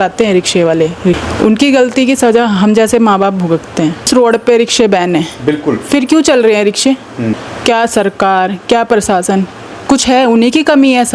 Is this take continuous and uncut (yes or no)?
no